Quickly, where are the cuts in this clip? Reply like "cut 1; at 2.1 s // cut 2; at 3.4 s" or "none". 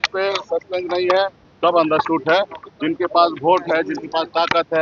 none